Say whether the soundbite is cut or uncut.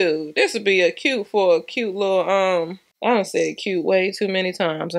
uncut